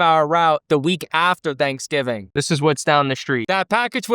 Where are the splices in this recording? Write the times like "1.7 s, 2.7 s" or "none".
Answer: 2.3 s